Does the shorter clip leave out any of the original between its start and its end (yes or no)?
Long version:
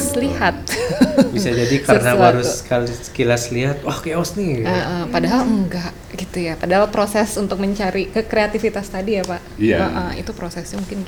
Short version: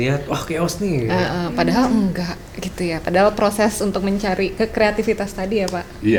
no